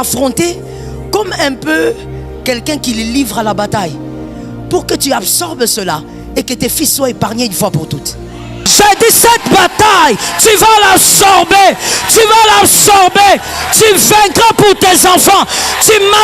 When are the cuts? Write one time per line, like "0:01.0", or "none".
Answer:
0:08.7